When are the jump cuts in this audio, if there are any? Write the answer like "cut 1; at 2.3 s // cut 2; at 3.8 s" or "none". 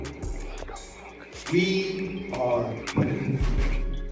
none